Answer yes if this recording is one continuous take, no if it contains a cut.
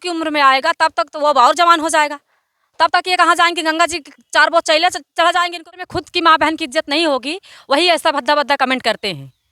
no